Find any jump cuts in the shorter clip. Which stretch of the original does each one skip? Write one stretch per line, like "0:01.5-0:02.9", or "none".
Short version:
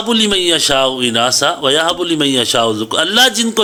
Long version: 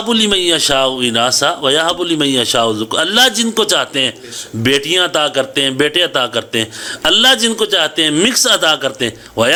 none